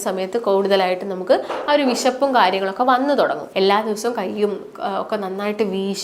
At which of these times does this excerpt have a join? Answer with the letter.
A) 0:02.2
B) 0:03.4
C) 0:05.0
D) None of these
B